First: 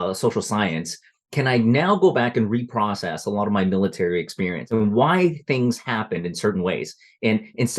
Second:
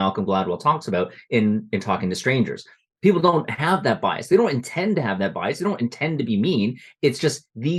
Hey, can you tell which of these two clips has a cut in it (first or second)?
first